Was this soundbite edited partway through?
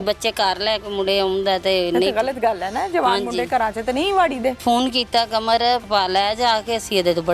yes; 2 cuts; at 4.6 s, 5.8 s

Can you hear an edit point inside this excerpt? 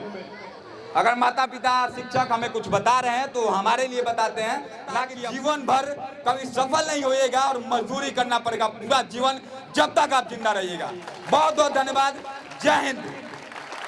yes; 1 cut; at 5.1 s

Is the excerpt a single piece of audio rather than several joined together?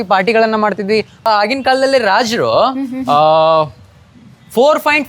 no; 1 cut; at 1.3 s

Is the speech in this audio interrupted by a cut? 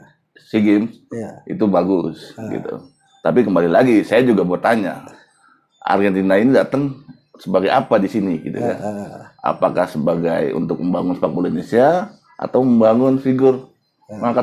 no; 0 cuts

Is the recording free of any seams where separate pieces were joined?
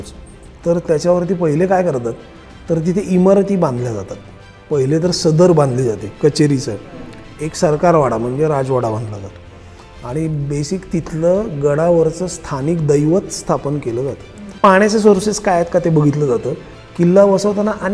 no; 1 cut; at 14.6 s

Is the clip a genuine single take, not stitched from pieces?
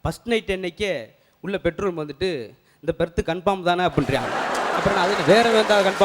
yes; 0 cuts

